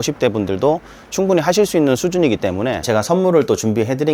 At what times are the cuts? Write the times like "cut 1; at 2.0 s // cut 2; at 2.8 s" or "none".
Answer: cut 1; at 2.8 s

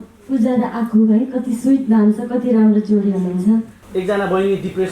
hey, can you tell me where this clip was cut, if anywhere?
cut 1; at 3.8 s

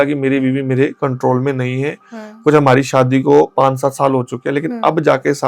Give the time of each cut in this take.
none

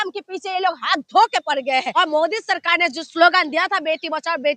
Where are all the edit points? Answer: cut 1; at 1.9 s

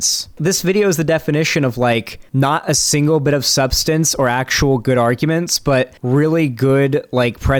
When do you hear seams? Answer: none

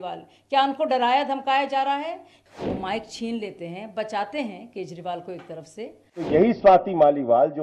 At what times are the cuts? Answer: cut 1; at 2.3 s // cut 2; at 6.3 s

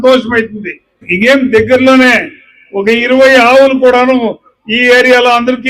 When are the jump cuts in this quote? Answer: cut 1; at 1.1 s

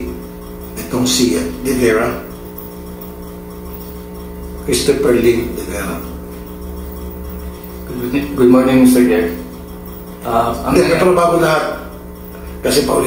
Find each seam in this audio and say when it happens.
cut 1; at 2.4 s

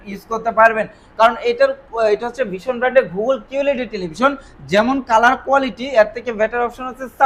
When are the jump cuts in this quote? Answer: none

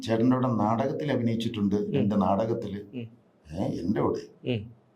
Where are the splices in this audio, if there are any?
none

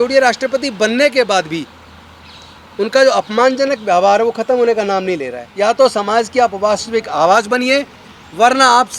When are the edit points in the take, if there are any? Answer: cut 1; at 5.4 s

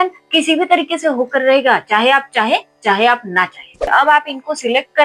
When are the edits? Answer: cut 1; at 3.8 s

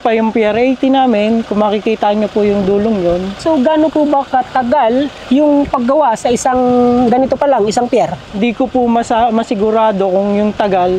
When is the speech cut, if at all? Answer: cut 1; at 3.3 s

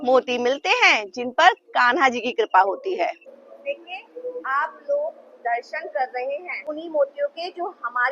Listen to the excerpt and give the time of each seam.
cut 1; at 3.2 s // cut 2; at 6.6 s

